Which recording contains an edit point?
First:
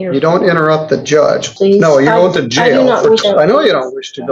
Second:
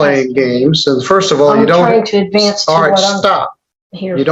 first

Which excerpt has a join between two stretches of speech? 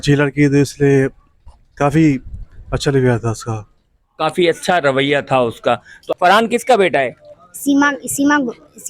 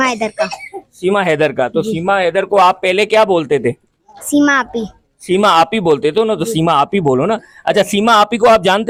first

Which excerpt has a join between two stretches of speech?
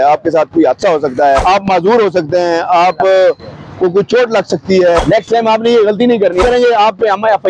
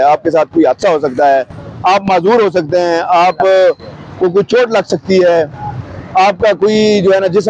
first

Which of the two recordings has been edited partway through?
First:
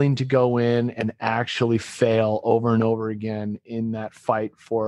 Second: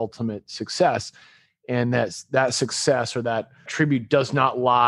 second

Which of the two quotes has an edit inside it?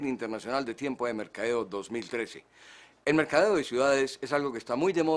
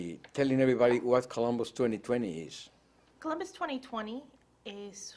first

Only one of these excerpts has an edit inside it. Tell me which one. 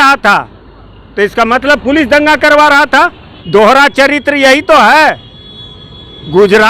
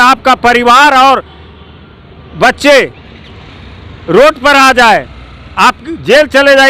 first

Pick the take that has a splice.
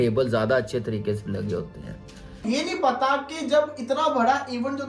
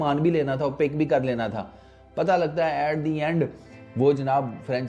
first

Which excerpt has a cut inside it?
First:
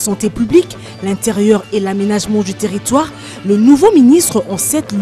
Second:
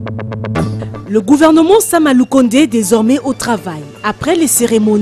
second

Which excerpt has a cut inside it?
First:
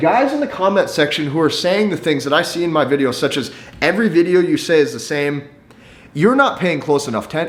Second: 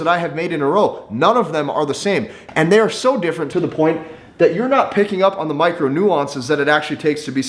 second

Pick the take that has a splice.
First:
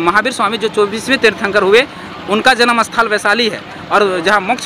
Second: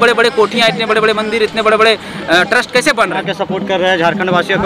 second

